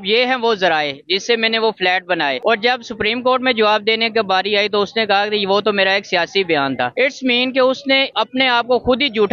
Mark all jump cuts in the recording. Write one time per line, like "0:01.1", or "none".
none

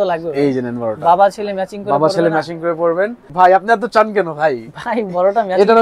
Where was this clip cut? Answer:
0:03.3

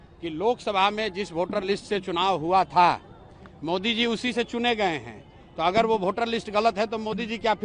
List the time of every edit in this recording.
none

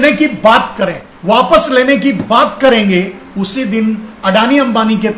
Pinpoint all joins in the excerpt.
0:01.1

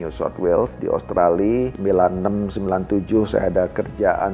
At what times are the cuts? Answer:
0:01.7

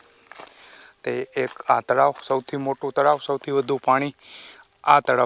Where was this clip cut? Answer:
none

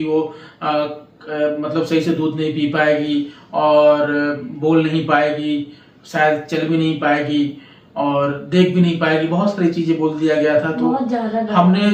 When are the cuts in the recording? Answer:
none

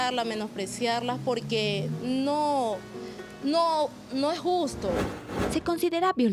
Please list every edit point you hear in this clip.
0:05.1

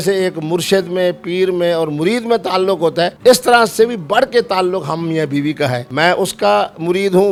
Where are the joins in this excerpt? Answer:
none

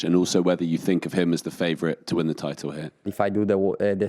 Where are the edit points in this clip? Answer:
0:03.1

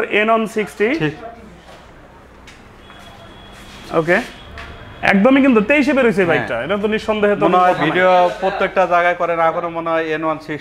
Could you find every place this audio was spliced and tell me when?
none

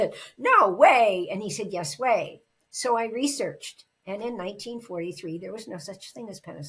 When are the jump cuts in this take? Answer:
none

